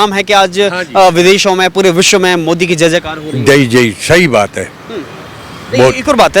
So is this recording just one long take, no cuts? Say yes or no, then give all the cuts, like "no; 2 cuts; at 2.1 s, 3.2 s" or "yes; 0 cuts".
yes; 0 cuts